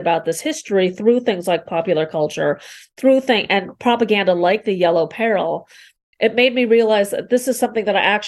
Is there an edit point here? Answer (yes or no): no